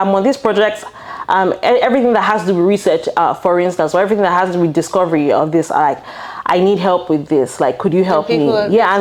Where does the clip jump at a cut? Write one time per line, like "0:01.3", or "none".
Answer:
none